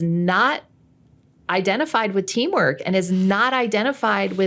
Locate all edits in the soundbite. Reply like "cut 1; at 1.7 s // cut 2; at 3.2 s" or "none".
none

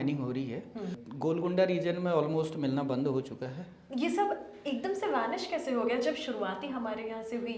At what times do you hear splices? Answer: cut 1; at 1.0 s

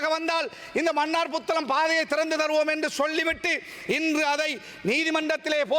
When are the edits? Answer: cut 1; at 2.1 s

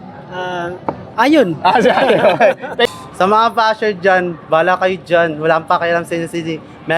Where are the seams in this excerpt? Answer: cut 1; at 2.9 s

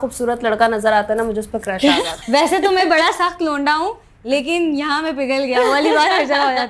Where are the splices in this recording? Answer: cut 1; at 2.2 s

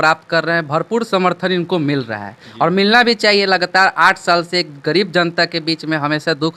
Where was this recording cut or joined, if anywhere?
none

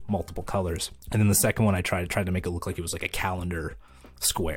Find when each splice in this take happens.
cut 1; at 0.9 s

